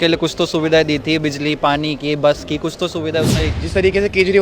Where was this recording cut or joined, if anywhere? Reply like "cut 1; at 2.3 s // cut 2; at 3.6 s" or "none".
cut 1; at 3.4 s